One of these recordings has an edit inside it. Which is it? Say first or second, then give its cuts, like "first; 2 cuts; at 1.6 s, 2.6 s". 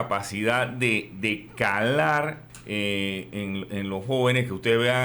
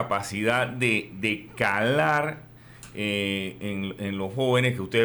first; 1 cut; at 2.5 s